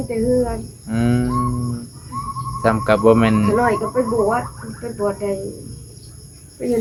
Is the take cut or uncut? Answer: uncut